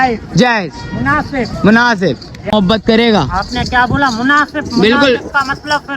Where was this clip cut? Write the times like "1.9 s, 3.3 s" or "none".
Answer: 2.5 s